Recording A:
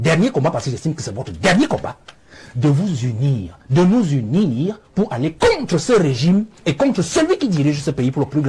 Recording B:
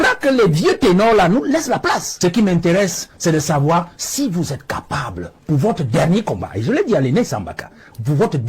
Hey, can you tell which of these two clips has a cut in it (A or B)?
B